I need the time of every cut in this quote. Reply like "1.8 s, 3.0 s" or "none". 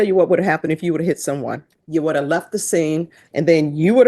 1.7 s, 3.2 s